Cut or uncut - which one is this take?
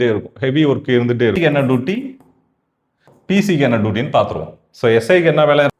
cut